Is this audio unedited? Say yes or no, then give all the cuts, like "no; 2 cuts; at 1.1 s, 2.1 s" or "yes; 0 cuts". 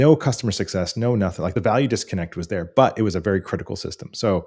no; 1 cut; at 1.5 s